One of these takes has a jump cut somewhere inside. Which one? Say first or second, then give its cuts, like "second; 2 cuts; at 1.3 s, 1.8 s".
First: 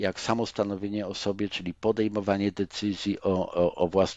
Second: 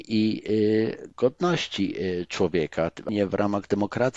second; 1 cut; at 3.1 s